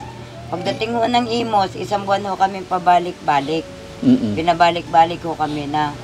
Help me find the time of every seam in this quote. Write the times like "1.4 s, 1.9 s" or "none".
none